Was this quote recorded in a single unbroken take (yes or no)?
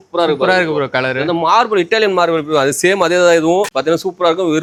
yes